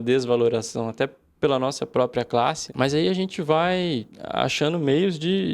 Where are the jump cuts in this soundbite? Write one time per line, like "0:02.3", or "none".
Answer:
0:02.6
0:04.2